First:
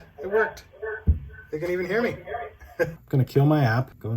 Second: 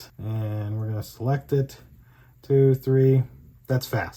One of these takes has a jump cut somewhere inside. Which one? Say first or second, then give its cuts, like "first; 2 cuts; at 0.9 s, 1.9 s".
first; 1 cut; at 2.9 s